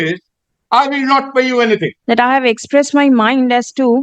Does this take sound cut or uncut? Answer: cut